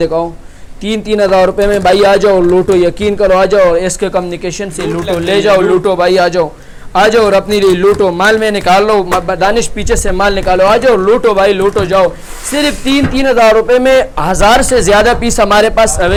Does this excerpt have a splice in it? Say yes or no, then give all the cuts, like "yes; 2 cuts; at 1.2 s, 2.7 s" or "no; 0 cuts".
no; 0 cuts